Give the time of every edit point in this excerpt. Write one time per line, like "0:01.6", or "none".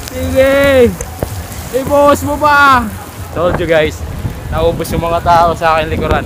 0:03.2